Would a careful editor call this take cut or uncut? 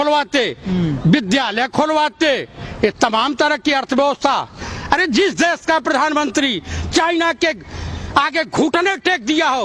uncut